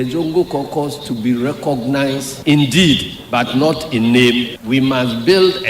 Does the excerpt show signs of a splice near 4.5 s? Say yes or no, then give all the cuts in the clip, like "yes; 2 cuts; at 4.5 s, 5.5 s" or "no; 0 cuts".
yes; 1 cut; at 4.5 s